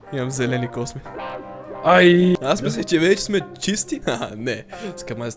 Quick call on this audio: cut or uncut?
cut